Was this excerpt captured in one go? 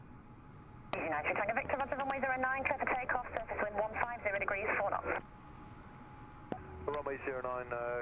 yes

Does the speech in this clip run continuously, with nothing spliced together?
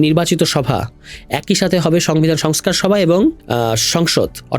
no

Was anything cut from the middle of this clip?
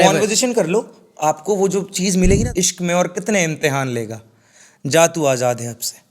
yes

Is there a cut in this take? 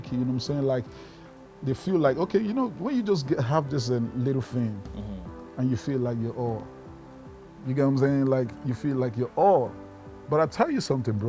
no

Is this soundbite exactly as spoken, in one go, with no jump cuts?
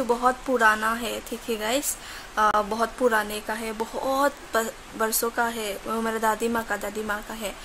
yes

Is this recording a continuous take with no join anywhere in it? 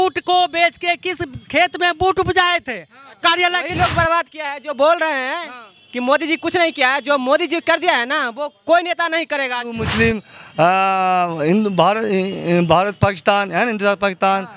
no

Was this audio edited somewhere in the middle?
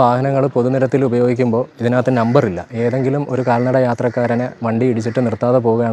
no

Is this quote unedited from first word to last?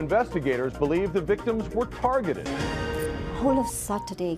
no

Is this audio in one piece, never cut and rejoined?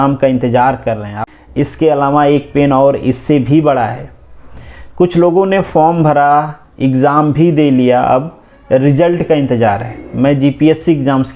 no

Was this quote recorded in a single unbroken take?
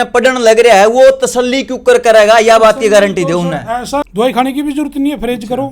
no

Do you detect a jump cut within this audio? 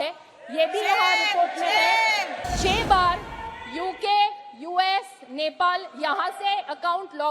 yes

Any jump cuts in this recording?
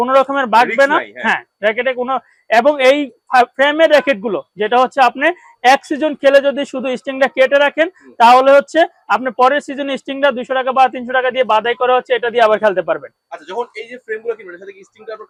no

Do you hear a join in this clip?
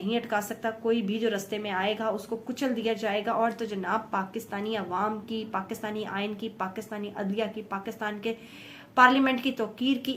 no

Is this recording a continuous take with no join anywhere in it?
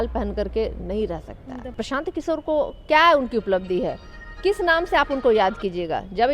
no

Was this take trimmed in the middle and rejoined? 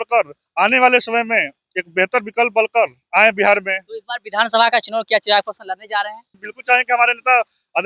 yes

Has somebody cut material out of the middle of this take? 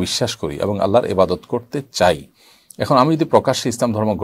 no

